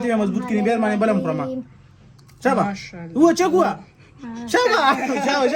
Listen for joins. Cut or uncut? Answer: uncut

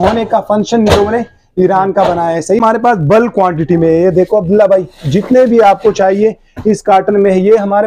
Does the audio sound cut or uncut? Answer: cut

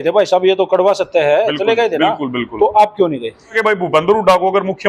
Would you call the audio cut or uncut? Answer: cut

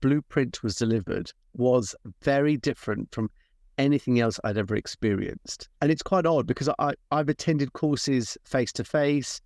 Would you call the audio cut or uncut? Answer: cut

